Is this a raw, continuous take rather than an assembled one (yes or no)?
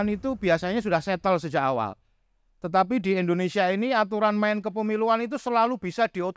yes